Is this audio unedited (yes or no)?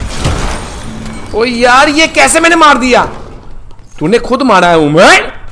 yes